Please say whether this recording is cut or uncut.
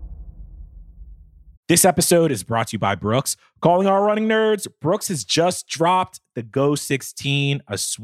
cut